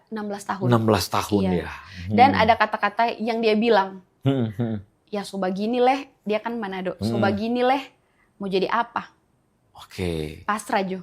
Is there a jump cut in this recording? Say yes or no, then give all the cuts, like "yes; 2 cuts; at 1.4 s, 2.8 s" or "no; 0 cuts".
no; 0 cuts